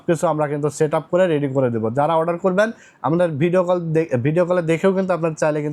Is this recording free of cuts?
yes; 0 cuts

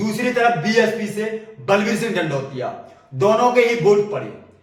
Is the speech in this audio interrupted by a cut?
no; 0 cuts

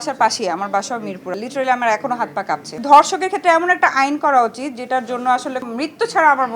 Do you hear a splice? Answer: yes; 3 cuts; at 1.3 s, 2.8 s, 5.6 s

